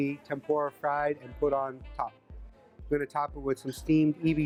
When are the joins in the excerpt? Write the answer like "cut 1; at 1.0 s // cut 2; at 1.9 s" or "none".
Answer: none